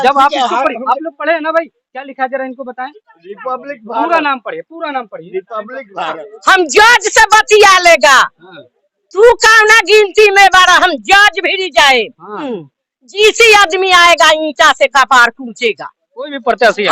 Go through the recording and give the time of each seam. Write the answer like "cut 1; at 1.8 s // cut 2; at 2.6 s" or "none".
cut 1; at 6.3 s // cut 2; at 12.6 s